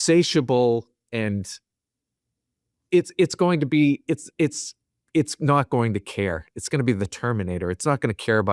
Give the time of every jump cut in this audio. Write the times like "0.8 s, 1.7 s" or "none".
none